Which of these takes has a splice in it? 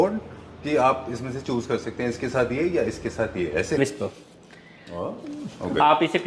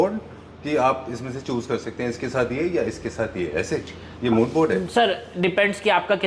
first; 1 cut; at 3.8 s

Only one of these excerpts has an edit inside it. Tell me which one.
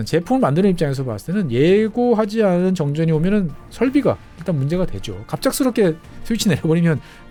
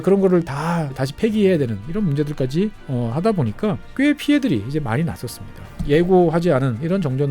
second; 4 cuts; at 1.1 s, 2.8 s, 3.8 s, 5.7 s

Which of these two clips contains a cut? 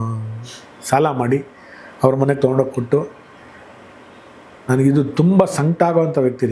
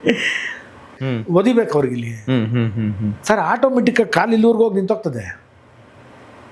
second; 1 cut; at 1.0 s

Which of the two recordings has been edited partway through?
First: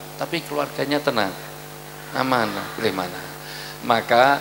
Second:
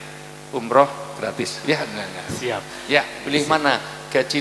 second; 1 cut; at 3.2 s

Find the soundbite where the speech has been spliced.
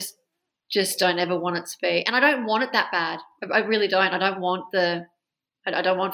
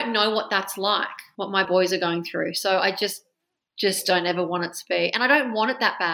second; 1 cut; at 1.5 s

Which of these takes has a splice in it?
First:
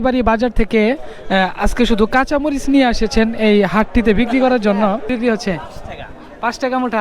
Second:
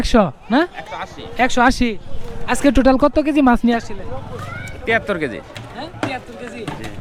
first; 1 cut; at 5.1 s

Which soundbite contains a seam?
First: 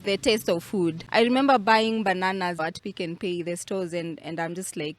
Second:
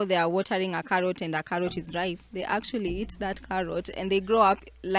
first; 2 cuts; at 1.0 s, 2.6 s

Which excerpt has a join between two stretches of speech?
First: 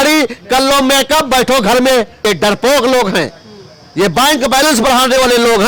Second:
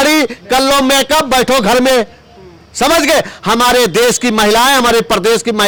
first; 1 cut; at 2.2 s

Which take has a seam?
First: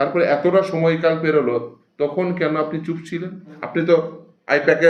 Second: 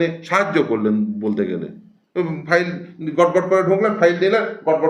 first; 1 cut; at 3.5 s

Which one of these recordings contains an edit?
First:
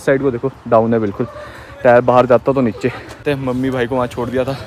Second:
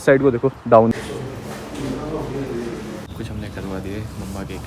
second; 2 cuts; at 0.9 s, 3.1 s

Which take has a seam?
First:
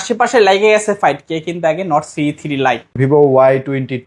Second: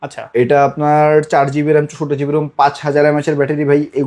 first; 1 cut; at 3.0 s

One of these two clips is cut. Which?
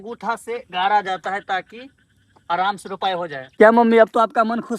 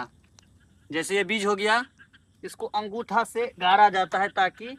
first; 1 cut; at 3.5 s

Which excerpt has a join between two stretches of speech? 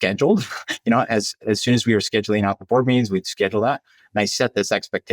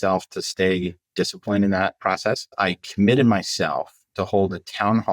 second; 1 cut; at 2.5 s

